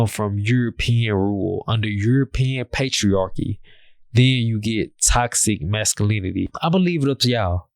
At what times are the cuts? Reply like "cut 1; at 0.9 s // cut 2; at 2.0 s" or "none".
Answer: cut 1; at 6.5 s